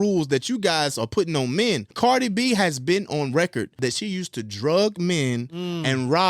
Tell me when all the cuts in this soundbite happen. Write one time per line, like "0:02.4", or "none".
0:01.9
0:03.8